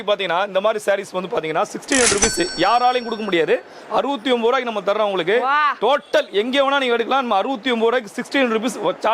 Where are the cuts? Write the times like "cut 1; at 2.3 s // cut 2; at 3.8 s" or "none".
none